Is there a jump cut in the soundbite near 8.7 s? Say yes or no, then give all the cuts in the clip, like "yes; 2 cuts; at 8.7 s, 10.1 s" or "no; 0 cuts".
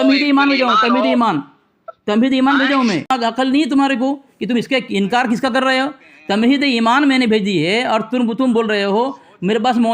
no; 1 cut; at 3.1 s